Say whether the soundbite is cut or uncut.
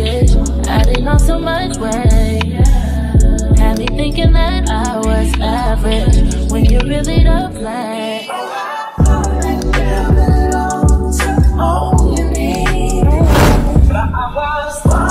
uncut